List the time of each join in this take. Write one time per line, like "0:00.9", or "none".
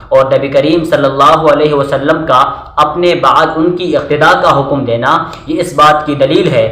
none